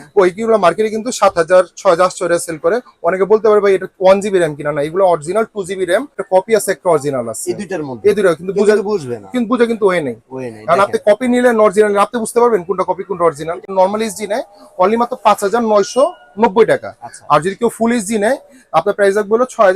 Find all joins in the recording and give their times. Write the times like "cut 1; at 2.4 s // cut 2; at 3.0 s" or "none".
cut 1; at 6.2 s // cut 2; at 13.7 s